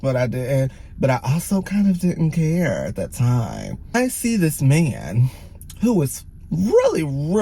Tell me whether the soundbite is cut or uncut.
cut